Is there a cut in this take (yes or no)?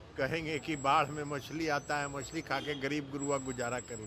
no